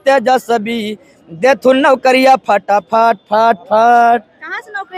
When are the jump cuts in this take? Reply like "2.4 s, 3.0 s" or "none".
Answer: none